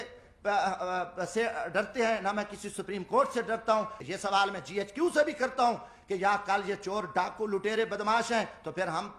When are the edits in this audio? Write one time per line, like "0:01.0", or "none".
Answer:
0:04.0